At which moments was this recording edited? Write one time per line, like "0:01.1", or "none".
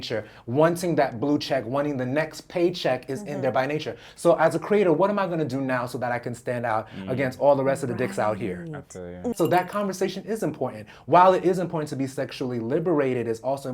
0:09.3